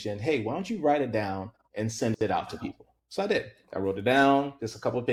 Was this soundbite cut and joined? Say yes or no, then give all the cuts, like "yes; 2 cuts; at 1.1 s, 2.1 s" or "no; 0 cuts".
no; 0 cuts